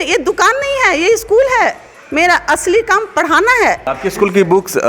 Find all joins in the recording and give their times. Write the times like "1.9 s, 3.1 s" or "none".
3.9 s